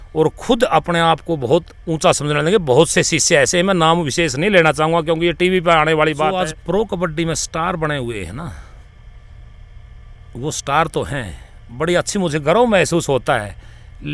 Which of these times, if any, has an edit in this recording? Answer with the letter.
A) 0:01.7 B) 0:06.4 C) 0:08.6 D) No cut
B